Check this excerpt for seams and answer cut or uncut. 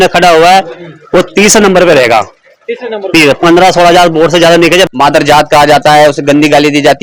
cut